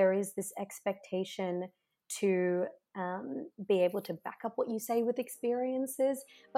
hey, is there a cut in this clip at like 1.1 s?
no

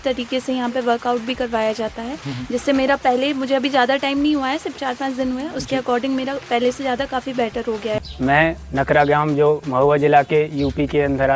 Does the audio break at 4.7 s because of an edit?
no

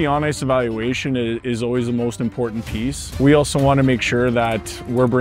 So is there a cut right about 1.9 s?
no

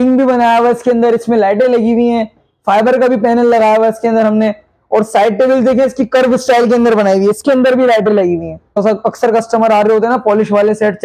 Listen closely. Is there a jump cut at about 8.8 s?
yes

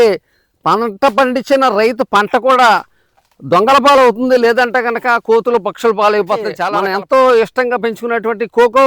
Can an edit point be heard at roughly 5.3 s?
no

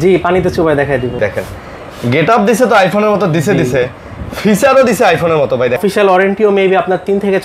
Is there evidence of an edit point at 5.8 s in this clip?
yes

